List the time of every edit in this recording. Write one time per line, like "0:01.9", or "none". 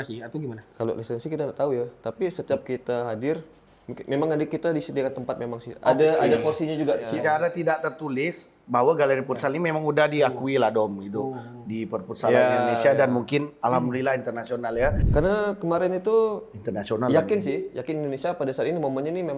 0:07.0
0:15.0